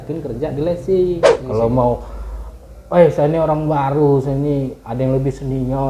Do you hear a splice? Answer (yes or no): yes